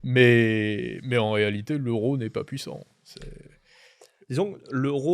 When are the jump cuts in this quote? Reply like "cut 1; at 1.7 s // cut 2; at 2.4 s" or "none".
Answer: none